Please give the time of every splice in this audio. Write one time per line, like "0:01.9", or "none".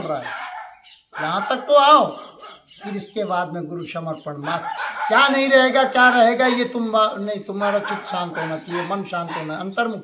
0:04.8

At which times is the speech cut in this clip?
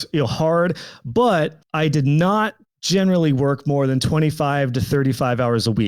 0:01.6

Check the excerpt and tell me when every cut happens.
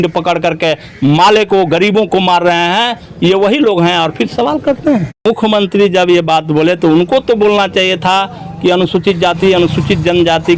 0:05.2

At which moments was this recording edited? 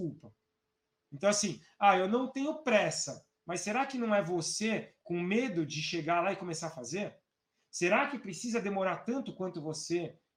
none

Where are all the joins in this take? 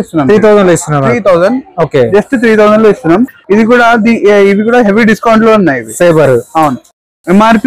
none

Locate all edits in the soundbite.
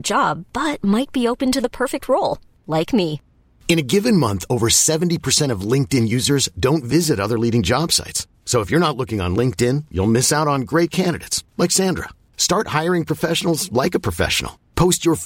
none

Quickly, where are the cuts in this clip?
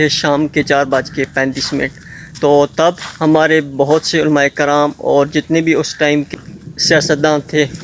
0:06.3

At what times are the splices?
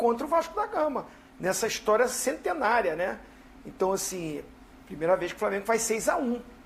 none

